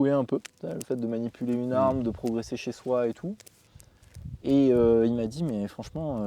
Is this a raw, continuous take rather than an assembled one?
yes; 0 cuts

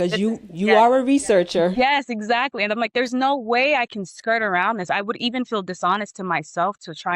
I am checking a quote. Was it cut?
yes; 1 cut; at 1.7 s

